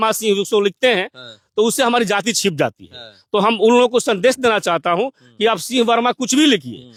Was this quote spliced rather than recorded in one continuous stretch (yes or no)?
no